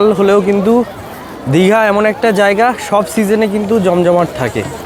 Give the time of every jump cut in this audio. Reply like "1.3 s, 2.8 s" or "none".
none

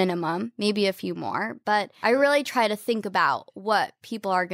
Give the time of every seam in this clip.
1.9 s

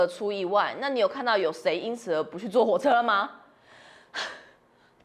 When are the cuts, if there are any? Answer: none

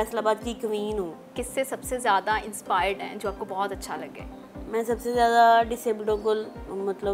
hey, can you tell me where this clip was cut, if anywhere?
1.3 s

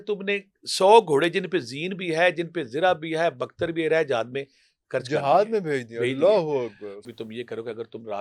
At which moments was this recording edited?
6.9 s

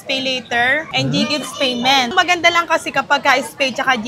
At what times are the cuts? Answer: 0.9 s, 2.1 s

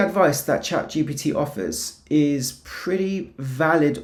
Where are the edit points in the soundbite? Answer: none

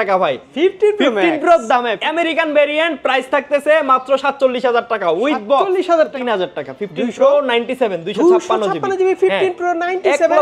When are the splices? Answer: 2.0 s, 6.1 s

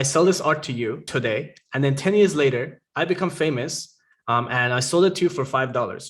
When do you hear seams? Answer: 1.0 s, 2.8 s

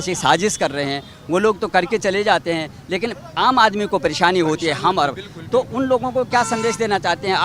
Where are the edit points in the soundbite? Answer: none

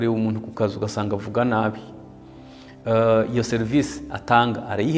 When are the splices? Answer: none

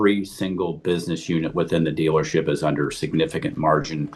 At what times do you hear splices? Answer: none

